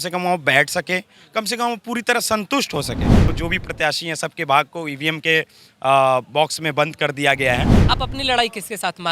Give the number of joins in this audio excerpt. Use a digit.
2